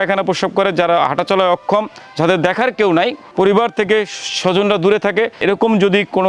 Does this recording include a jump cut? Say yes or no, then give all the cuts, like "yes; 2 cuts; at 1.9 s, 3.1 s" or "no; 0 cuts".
yes; 1 cut; at 5.4 s